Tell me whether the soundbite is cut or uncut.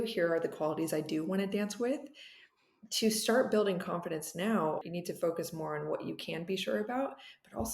cut